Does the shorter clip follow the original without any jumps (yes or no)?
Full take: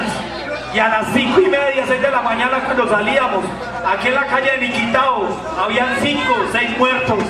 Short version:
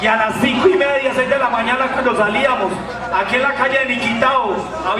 yes